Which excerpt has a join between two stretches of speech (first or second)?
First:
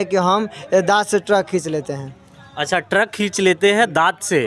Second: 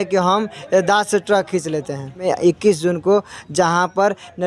second